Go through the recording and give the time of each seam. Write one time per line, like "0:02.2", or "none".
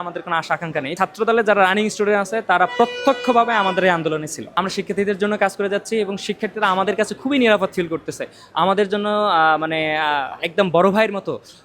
0:01.0
0:04.4